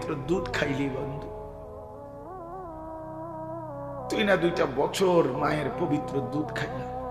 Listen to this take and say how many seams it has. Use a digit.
0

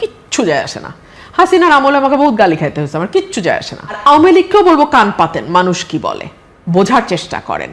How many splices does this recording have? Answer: 1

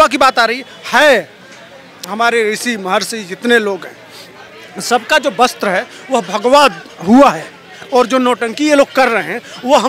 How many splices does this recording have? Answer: 0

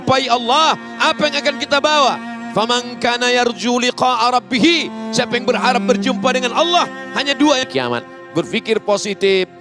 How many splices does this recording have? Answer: 1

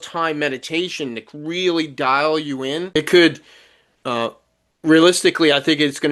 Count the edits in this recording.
1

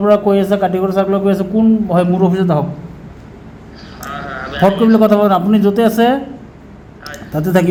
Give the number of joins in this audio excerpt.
0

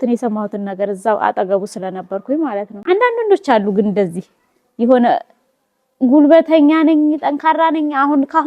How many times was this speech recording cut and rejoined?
1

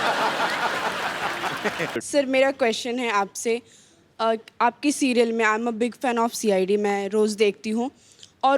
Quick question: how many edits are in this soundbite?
1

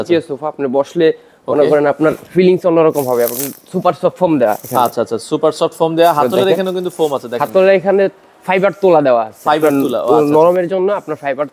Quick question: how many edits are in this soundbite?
0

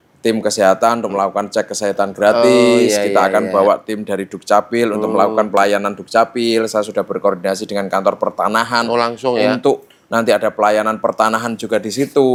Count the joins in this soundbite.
0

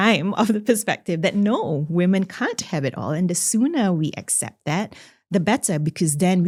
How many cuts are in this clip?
0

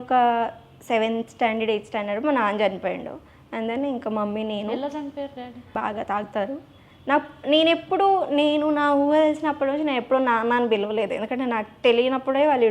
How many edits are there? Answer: 1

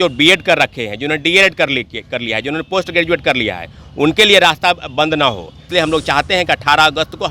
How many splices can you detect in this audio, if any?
1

